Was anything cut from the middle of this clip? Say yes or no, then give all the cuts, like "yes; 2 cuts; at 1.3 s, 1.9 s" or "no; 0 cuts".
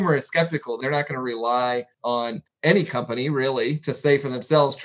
yes; 2 cuts; at 0.8 s, 2.2 s